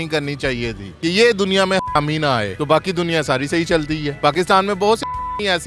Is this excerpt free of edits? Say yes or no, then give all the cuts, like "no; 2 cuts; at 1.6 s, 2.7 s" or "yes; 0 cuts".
yes; 0 cuts